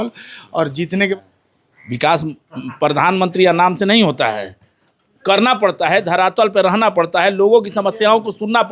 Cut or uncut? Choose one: cut